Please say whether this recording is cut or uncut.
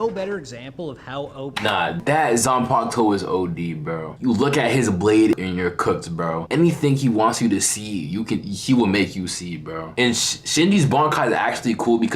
cut